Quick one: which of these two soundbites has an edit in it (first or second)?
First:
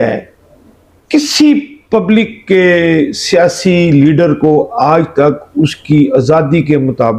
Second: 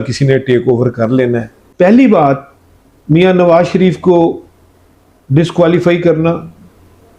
second